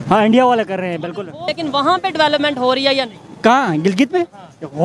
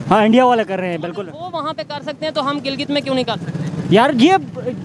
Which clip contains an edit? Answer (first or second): first